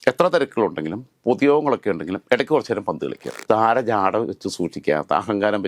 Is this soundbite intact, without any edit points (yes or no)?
no